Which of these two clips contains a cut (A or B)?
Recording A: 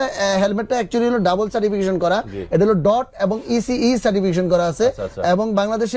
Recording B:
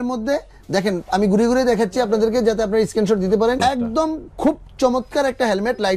B